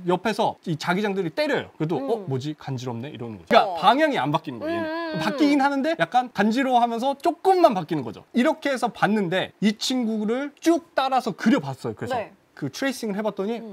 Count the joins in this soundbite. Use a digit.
1